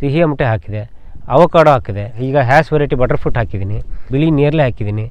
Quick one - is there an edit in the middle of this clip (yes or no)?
yes